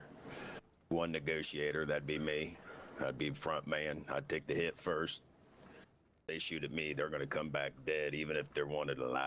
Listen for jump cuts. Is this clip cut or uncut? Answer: cut